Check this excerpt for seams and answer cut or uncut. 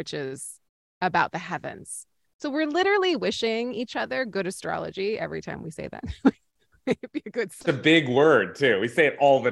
cut